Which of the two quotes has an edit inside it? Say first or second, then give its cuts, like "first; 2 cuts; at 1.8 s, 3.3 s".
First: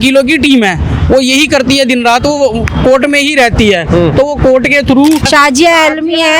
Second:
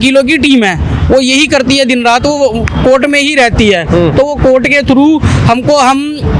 first; 1 cut; at 5.3 s